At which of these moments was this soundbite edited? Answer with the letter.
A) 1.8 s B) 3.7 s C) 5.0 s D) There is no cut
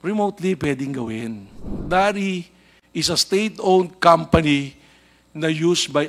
A